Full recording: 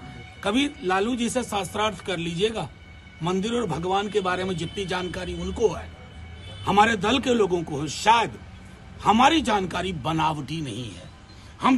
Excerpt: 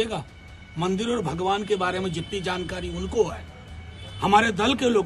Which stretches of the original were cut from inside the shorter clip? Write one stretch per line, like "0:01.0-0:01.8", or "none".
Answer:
none